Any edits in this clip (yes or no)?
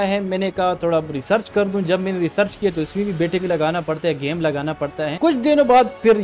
yes